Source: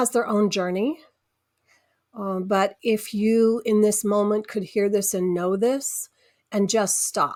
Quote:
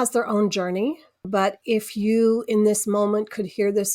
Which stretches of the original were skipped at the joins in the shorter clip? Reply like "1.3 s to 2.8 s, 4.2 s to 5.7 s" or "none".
1.2 s to 2.4 s